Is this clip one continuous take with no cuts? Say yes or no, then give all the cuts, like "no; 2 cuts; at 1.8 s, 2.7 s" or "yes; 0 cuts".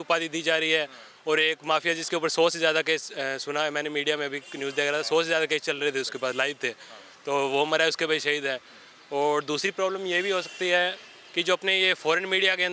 yes; 0 cuts